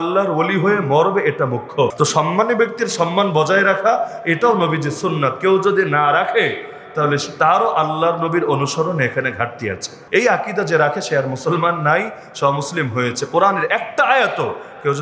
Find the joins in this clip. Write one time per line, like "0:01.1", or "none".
0:01.9
0:10.0